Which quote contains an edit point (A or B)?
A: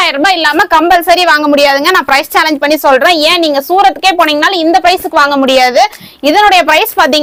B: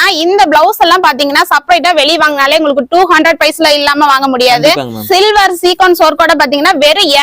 B